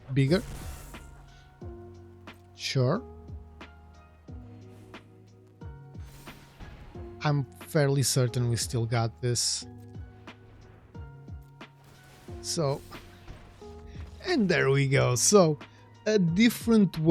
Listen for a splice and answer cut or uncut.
cut